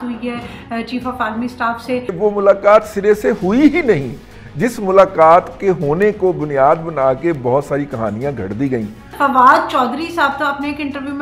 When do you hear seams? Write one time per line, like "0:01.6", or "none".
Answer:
0:02.2
0:09.1

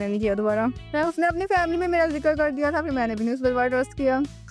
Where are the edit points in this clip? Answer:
none

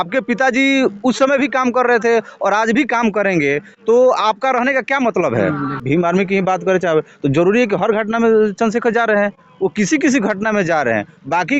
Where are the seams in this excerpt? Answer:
0:05.7

